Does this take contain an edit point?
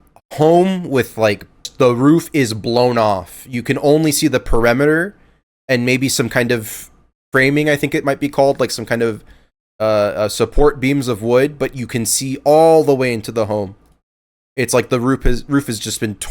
yes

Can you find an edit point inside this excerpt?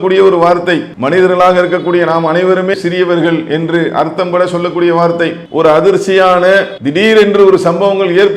yes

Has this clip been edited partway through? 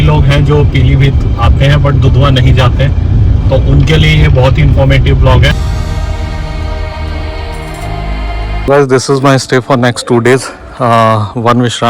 yes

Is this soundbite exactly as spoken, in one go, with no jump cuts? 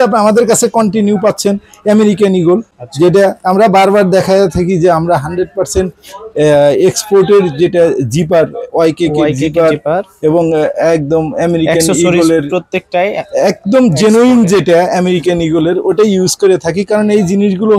yes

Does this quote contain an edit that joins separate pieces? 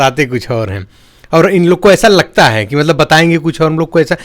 no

